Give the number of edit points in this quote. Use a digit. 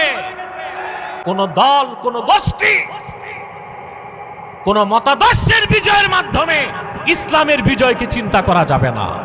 1